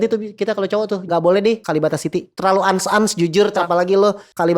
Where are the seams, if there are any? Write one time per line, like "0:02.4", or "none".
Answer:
0:01.0
0:02.3
0:03.6